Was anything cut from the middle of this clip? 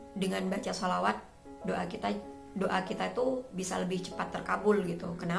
no; 0 cuts

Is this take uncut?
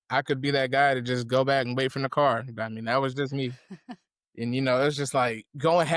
yes; 0 cuts

